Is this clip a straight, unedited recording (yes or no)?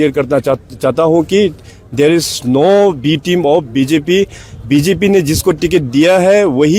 yes